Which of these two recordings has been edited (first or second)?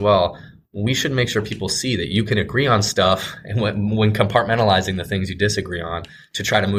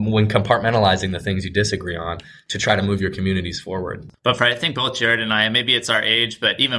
second